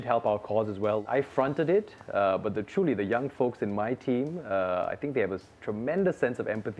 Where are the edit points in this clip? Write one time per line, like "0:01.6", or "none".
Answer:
0:01.0